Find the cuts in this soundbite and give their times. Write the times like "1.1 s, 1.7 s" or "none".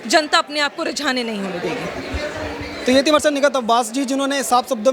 none